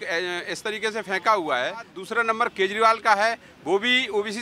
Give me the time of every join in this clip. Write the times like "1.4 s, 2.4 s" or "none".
2.0 s

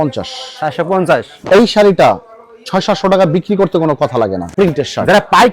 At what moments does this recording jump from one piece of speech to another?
4.5 s

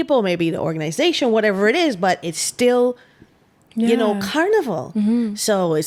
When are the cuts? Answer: none

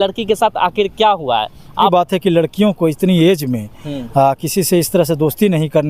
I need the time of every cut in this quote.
1.9 s

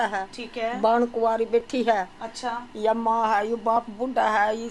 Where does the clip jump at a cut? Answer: none

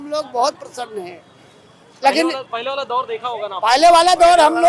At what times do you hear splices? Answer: none

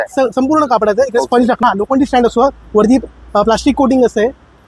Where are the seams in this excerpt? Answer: 1.6 s

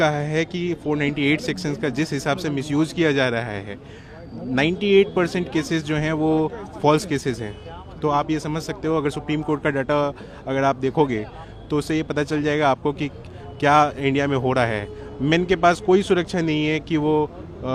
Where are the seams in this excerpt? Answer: none

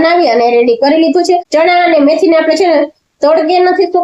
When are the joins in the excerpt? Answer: 1.5 s

